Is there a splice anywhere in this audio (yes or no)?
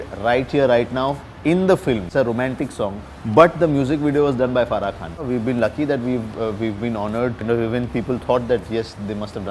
yes